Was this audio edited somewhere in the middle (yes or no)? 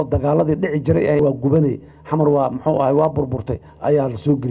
yes